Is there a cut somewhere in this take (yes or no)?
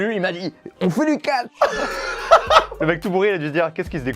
yes